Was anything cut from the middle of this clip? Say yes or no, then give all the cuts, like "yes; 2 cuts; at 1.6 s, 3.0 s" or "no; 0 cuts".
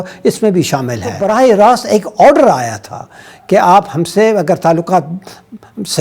yes; 1 cut; at 1.2 s